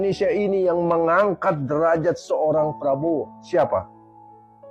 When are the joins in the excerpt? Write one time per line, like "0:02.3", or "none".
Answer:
none

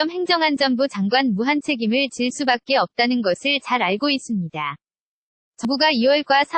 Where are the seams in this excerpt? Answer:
0:05.6

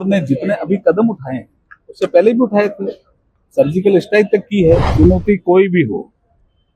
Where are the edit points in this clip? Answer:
0:04.9

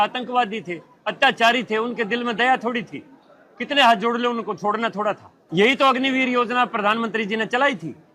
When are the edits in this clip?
0:05.3

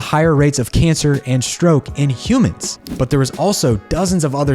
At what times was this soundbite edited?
0:02.7

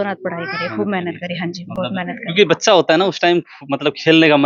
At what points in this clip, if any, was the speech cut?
none

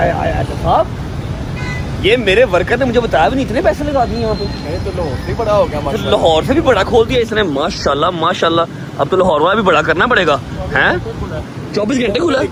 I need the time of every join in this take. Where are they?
none

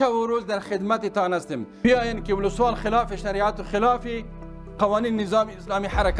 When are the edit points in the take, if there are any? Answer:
0:01.8

